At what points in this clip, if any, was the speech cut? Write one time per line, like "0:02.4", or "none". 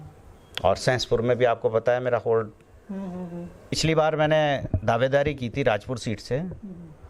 0:03.8